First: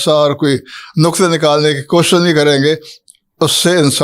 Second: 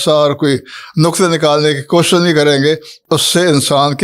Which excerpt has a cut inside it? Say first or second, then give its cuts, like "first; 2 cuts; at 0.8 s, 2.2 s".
second; 1 cut; at 2.9 s